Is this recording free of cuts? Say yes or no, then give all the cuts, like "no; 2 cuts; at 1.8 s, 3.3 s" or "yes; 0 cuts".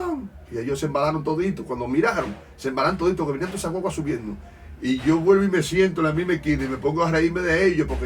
yes; 0 cuts